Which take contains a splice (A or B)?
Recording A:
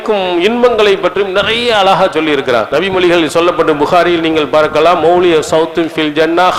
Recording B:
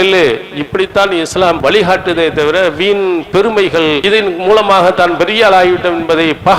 B